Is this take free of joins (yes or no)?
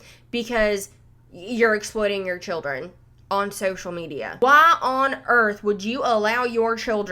no